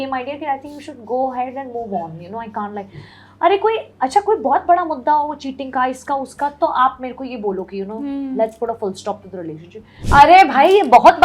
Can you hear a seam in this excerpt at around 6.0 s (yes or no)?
no